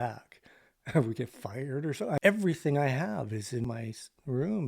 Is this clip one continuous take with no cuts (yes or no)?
no